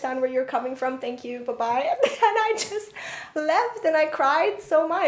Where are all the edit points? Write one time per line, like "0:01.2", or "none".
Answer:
none